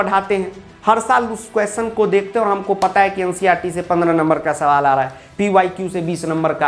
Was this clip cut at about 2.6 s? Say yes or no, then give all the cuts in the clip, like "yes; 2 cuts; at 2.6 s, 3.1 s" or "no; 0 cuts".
no; 0 cuts